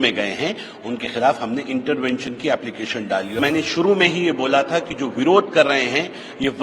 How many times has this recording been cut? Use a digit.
1